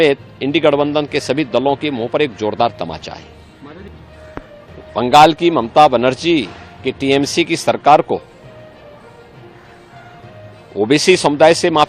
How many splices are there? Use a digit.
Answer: 1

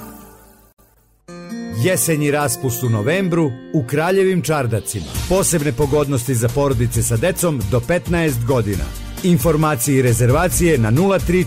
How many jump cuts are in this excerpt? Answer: 1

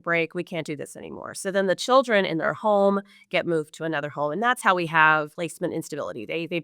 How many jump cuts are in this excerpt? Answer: 1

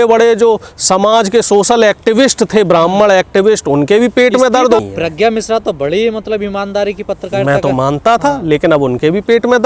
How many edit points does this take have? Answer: 1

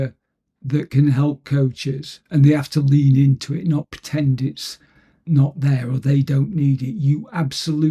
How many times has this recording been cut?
0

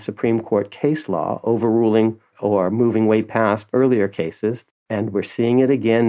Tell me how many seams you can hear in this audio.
3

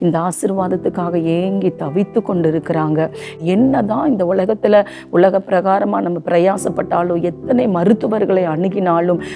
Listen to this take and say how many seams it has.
1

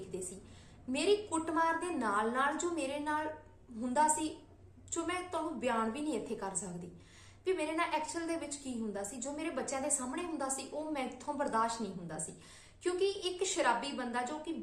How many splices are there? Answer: 0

